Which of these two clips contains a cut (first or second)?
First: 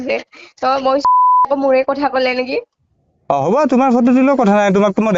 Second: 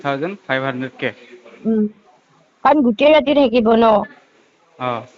first